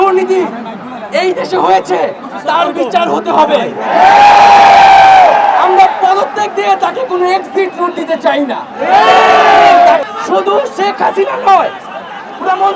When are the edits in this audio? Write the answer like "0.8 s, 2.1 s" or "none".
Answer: 10.1 s